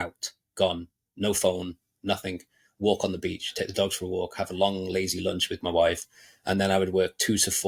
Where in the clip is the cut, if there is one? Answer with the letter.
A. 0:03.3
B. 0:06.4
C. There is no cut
C